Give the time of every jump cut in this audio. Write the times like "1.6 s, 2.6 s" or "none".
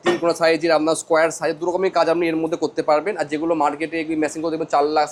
none